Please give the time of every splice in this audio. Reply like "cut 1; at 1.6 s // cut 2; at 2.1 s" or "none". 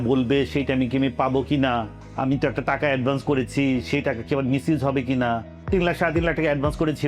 cut 1; at 2.0 s // cut 2; at 5.5 s